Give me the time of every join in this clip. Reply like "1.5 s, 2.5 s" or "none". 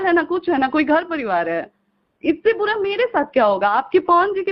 none

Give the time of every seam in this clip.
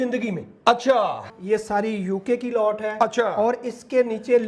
1.3 s

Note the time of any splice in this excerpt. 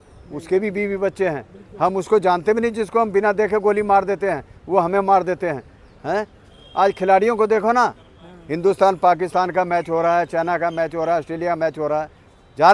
none

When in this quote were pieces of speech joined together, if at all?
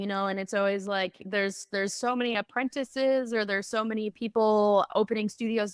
none

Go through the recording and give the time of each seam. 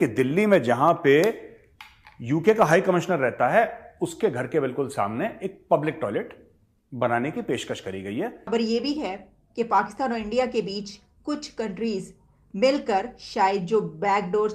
8.5 s

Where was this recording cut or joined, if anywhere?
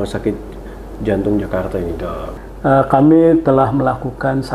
2.2 s

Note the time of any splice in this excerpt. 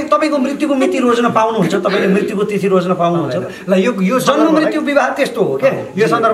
none

